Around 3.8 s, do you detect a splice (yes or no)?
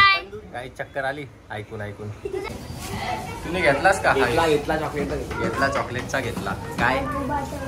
no